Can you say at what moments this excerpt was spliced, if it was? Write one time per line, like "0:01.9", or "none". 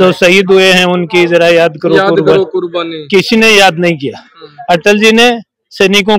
none

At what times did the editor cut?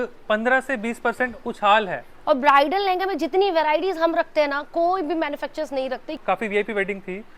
0:02.1
0:06.2

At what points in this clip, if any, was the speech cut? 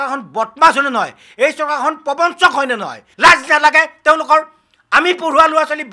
0:03.0

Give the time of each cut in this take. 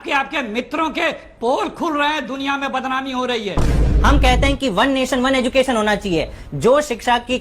0:03.9

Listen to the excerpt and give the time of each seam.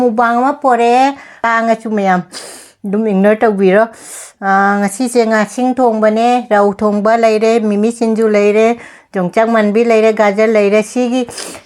0:01.5

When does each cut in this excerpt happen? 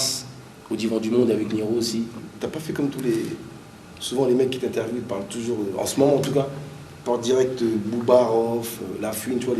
0:02.2

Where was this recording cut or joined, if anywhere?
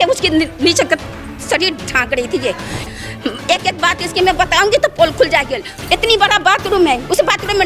0:02.8

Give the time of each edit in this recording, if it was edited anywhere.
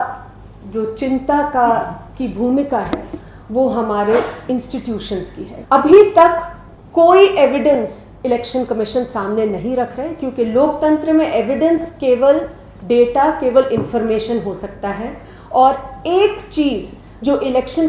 0:05.5

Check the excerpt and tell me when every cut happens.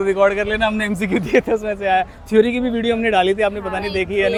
none

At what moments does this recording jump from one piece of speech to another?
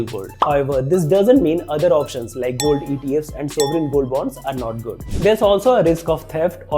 0:05.0

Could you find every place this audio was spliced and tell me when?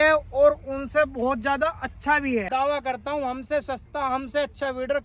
0:02.5

